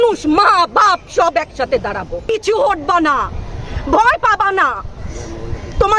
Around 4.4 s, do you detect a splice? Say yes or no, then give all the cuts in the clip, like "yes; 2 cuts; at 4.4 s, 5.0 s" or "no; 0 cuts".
no; 1 cut; at 2.2 s